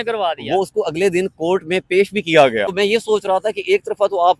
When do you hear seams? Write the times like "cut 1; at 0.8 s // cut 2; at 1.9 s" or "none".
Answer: cut 1; at 2.7 s

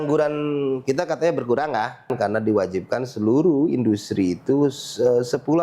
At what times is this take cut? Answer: cut 1; at 2.1 s

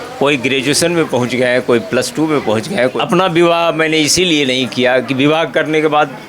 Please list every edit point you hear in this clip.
cut 1; at 2.9 s

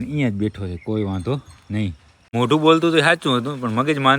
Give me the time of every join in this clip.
cut 1; at 2.3 s

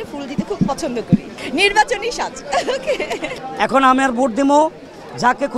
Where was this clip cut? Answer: cut 1; at 3.4 s

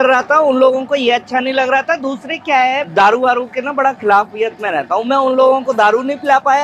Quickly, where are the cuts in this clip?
none

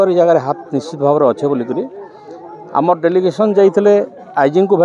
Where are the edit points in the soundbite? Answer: none

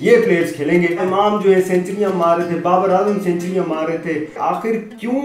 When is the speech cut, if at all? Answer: cut 1; at 1.0 s // cut 2; at 4.4 s

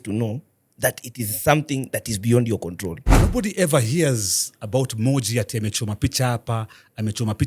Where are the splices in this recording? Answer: cut 1; at 3.2 s

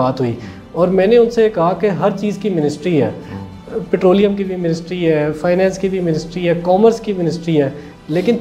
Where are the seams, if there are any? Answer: none

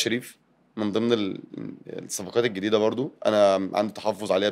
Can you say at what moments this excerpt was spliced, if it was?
none

